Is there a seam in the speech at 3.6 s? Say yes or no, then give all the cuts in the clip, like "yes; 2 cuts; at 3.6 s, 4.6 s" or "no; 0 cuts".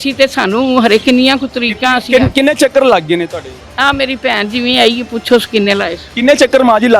yes; 1 cut; at 3.6 s